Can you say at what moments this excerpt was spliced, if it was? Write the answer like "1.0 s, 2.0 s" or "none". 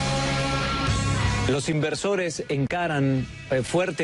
none